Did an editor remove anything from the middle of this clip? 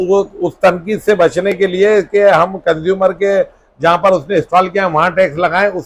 no; 0 cuts

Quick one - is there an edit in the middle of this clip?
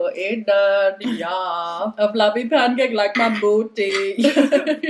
no; 0 cuts

